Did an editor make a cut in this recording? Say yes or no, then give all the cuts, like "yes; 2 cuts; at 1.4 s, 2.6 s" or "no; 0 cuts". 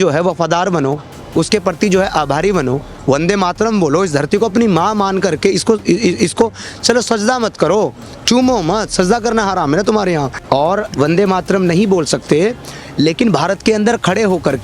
yes; 1 cut; at 10.3 s